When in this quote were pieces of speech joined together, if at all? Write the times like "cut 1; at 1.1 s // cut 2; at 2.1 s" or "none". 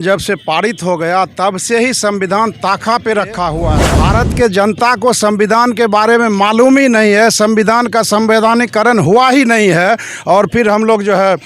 cut 1; at 3.7 s